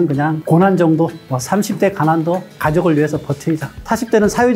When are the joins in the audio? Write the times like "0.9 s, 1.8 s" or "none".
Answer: 1.2 s, 2.5 s